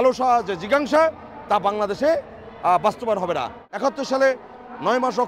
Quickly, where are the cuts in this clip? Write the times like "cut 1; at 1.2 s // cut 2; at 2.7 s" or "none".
cut 1; at 3.6 s